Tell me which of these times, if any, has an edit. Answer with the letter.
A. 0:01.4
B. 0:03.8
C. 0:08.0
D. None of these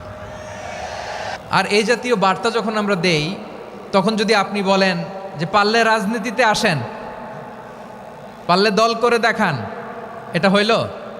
A